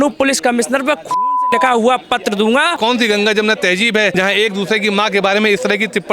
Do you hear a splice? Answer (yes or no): yes